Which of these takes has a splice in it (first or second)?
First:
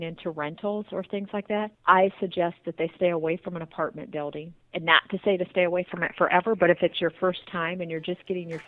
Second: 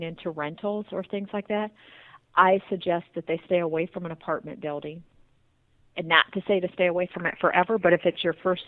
first